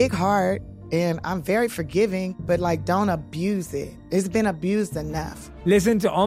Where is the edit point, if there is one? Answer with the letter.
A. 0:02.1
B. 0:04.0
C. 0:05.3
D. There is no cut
D